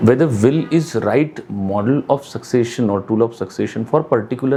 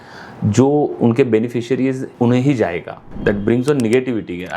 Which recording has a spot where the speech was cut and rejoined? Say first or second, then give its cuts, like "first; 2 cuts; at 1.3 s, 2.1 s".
second; 2 cuts; at 2.1 s, 3.1 s